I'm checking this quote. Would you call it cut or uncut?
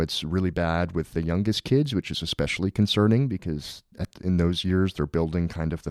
uncut